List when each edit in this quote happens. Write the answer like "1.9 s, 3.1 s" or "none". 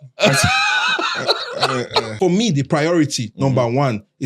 2.1 s

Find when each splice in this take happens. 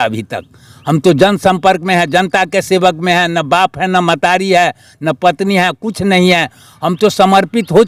none

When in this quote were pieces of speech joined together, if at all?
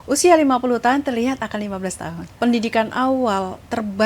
2.3 s

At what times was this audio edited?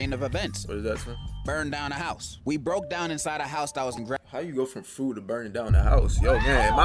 4.0 s

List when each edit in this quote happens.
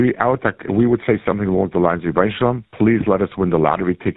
2.6 s

